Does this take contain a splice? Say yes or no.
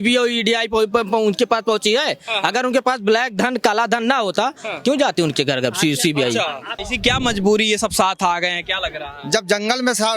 yes